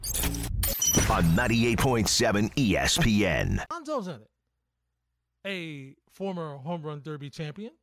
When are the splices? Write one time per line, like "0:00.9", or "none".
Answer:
0:03.7